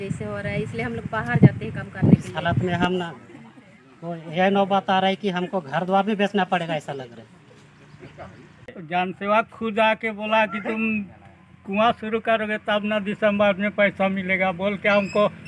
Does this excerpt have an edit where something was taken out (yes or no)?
yes